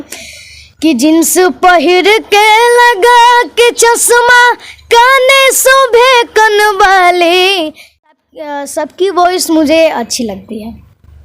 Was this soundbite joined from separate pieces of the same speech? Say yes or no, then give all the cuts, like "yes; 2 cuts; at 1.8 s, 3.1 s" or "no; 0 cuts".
yes; 1 cut; at 8.1 s